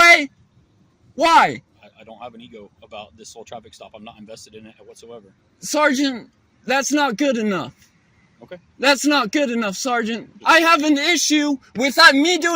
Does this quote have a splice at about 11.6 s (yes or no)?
no